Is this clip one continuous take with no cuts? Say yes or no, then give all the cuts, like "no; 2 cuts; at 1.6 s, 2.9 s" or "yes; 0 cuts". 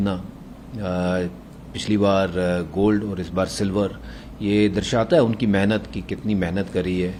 yes; 0 cuts